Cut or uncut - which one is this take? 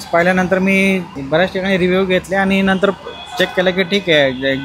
cut